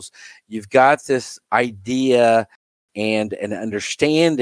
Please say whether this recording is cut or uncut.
cut